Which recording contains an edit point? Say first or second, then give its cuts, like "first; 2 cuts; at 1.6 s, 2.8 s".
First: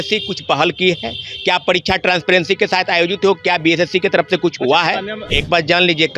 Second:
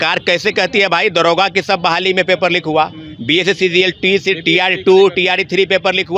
first; 1 cut; at 5.2 s